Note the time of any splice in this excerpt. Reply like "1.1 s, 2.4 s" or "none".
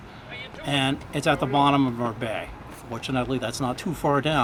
none